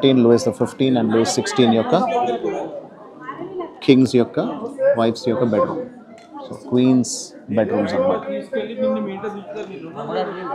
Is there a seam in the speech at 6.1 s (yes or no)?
no